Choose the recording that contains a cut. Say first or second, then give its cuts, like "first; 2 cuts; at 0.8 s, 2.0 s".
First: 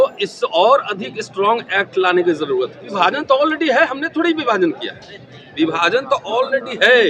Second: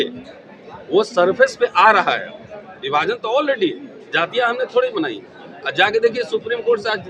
first; 1 cut; at 2.8 s